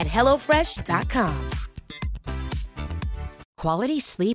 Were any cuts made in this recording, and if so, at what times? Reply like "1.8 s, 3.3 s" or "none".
3.4 s